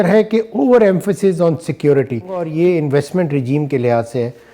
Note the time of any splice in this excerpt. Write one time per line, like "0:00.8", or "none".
0:02.4